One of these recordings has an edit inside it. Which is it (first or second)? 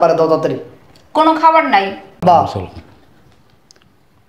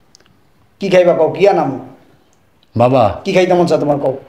first